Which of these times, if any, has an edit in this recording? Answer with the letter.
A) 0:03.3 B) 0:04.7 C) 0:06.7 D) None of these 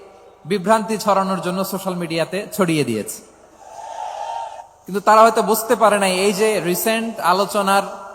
B